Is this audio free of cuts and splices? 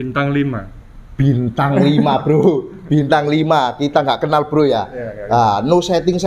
yes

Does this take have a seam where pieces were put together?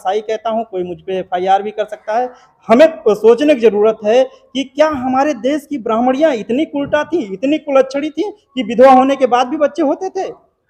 no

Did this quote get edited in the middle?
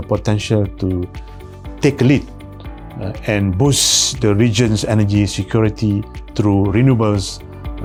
no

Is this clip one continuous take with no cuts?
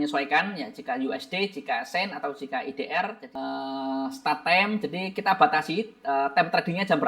no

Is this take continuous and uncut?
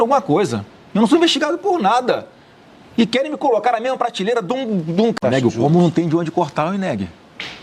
no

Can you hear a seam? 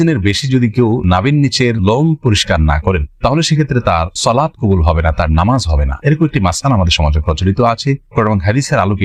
no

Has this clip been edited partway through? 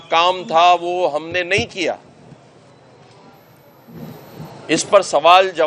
no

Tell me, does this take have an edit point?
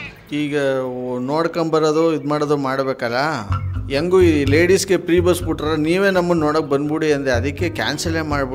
no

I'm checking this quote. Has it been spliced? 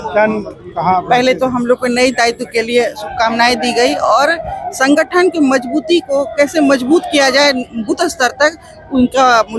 no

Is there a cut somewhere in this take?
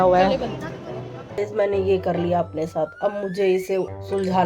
yes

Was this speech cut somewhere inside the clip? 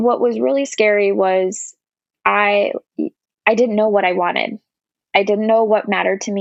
no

